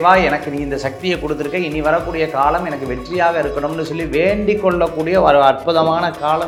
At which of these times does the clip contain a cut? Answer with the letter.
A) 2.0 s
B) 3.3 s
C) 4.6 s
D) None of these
D